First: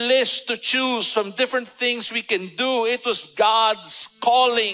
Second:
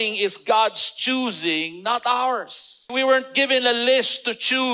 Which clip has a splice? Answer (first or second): second